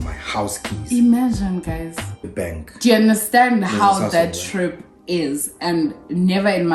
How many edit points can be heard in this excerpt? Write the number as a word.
one